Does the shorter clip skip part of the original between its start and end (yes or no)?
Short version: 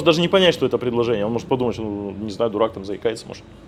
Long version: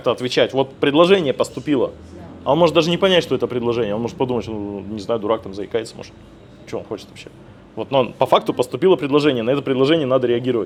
no